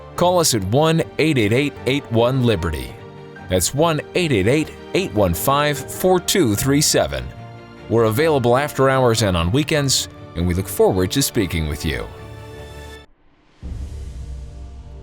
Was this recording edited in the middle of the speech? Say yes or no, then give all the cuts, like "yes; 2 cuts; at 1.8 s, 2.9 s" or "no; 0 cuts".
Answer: yes; 1 cut; at 12.1 s